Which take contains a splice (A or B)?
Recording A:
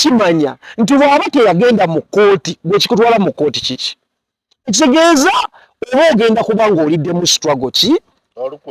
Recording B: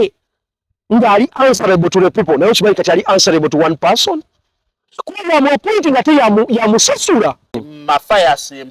B